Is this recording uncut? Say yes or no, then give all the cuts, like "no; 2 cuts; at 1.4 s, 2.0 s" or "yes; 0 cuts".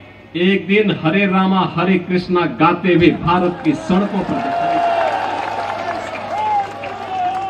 no; 1 cut; at 4.3 s